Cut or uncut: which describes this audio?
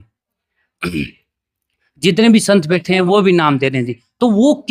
uncut